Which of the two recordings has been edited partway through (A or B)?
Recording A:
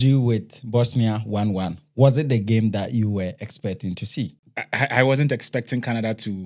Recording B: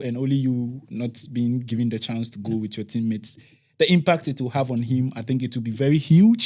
A